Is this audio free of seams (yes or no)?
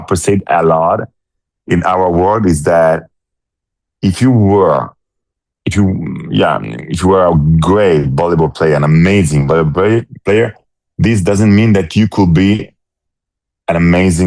yes